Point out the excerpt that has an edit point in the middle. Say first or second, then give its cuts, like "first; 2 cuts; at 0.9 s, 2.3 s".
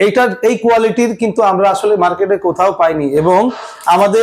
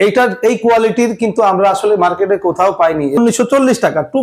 second; 1 cut; at 3.2 s